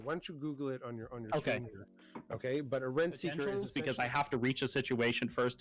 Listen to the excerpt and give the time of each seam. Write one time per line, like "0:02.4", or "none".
0:03.6